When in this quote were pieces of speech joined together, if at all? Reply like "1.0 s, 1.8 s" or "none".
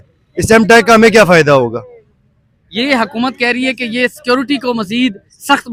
none